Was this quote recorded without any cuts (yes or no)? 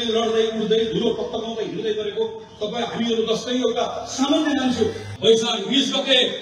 no